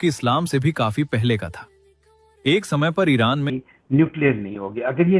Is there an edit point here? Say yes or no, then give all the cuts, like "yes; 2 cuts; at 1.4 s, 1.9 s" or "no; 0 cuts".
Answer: yes; 1 cut; at 3.5 s